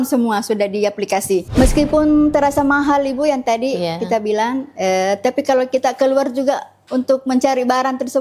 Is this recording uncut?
no; 1 cut; at 1.5 s

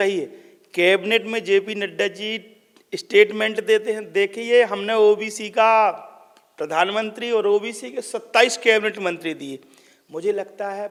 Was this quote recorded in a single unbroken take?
yes; 0 cuts

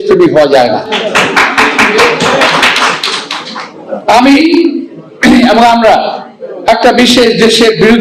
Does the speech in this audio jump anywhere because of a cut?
no; 0 cuts

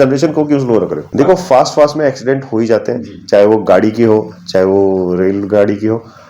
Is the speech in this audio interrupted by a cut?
yes; 1 cut; at 1.0 s

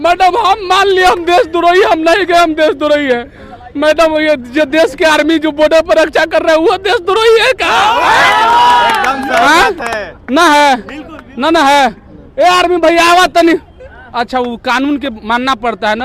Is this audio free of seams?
yes; 0 cuts

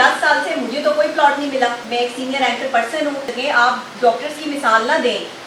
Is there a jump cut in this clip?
yes; 2 cuts; at 1.8 s, 3.3 s

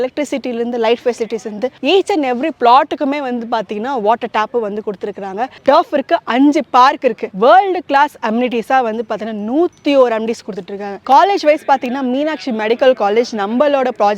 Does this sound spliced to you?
yes; 4 cuts; at 1.8 s, 5.5 s, 7.3 s, 10.9 s

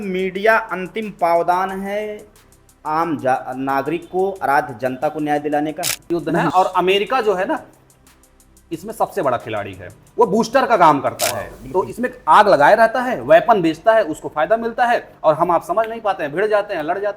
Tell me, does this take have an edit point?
yes; 2 cuts; at 6.3 s, 11.6 s

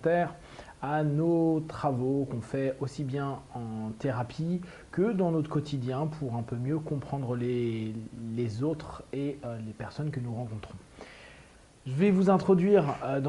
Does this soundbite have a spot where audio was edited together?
no; 0 cuts

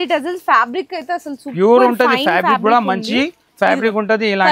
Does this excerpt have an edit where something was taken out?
no; 0 cuts

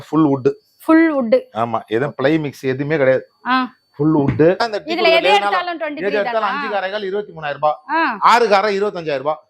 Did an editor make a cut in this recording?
yes; 1 cut; at 4.7 s

